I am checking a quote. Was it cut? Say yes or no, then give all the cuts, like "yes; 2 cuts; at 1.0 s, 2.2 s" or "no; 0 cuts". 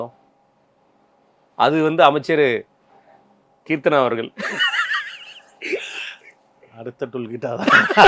no; 0 cuts